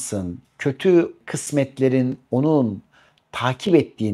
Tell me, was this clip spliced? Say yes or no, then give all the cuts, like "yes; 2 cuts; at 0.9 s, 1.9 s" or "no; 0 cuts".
yes; 1 cut; at 1.3 s